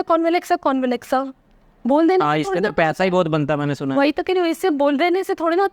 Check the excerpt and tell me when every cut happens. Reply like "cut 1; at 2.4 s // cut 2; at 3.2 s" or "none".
none